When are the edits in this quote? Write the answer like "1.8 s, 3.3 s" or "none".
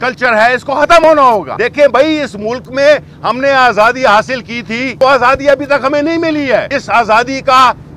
1.5 s, 4.9 s, 6.7 s